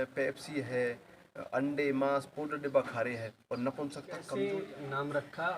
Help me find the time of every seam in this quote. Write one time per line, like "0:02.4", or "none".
0:04.2